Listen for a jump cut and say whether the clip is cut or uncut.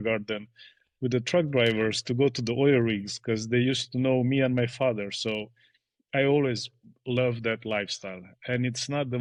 uncut